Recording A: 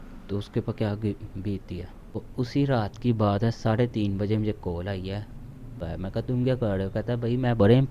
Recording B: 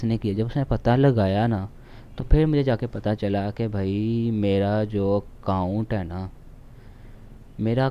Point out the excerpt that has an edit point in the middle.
A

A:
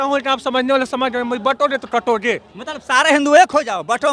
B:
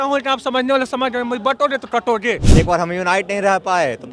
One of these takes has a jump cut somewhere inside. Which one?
B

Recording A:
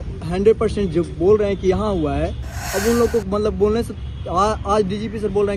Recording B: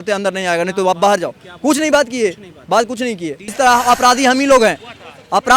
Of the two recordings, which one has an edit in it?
B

